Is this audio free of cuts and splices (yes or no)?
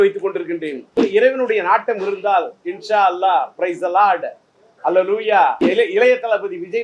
no